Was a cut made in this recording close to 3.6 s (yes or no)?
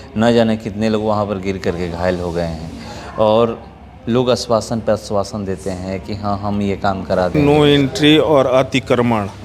no